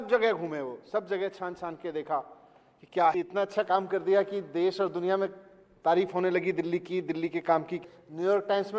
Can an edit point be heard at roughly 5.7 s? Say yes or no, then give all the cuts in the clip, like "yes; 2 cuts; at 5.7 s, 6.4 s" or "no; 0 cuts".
no; 2 cuts; at 3.1 s, 7.8 s